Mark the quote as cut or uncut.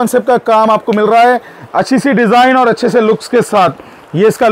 uncut